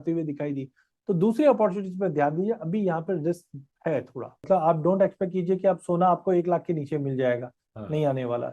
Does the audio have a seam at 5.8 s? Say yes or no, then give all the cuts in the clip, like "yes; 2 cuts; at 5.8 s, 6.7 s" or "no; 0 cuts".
no; 1 cut; at 4.4 s